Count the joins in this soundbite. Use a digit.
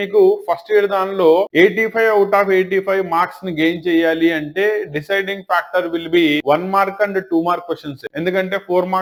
0